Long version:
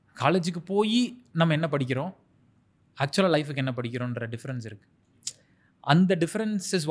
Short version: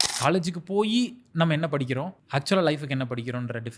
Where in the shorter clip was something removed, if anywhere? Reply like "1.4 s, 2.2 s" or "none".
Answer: 2.2 s